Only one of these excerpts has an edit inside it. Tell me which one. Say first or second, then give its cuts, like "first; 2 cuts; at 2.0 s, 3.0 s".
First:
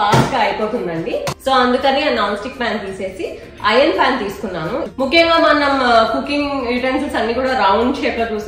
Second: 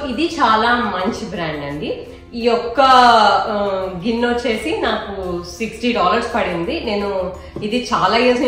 first; 2 cuts; at 1.3 s, 4.9 s